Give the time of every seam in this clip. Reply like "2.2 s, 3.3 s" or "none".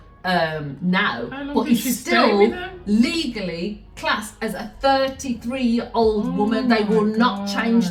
none